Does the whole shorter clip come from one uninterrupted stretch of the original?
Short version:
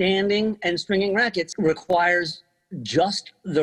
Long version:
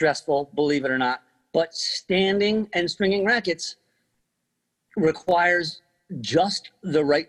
no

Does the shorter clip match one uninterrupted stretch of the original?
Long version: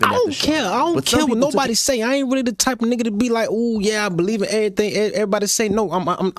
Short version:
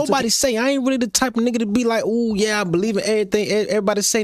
yes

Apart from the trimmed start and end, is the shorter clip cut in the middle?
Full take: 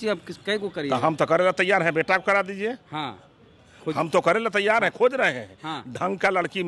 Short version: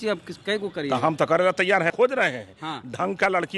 yes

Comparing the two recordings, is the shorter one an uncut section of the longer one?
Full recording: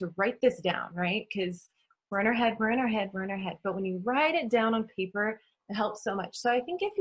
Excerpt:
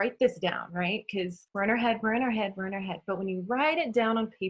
no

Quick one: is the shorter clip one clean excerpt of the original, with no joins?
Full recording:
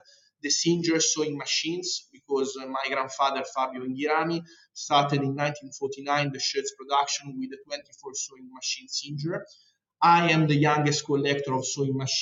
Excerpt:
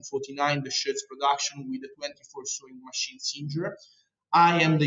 yes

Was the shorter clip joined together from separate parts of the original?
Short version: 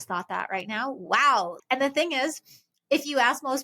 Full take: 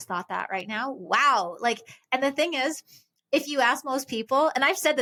yes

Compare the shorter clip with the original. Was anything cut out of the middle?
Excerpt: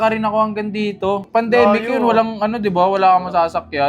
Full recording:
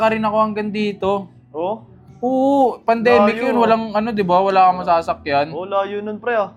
yes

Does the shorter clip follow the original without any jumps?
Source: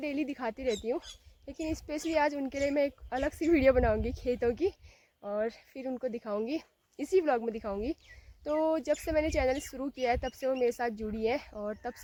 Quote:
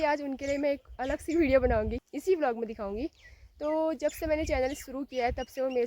no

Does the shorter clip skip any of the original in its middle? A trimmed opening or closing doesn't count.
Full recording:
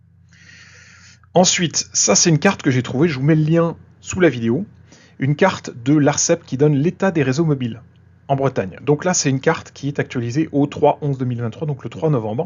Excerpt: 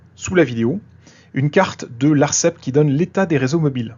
no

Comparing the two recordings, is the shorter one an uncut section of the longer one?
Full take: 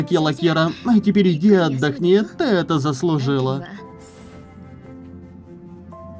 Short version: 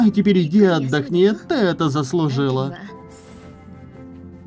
yes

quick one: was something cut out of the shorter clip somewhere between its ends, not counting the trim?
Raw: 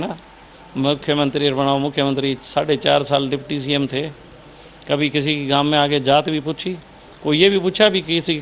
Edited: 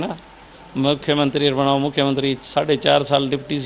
no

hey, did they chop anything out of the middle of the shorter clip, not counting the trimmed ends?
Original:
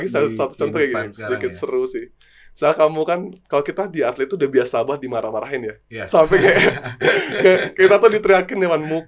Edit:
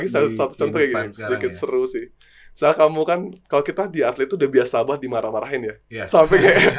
no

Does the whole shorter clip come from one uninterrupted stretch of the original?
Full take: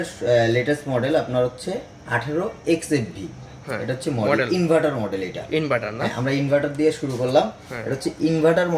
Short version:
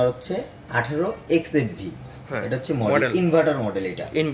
yes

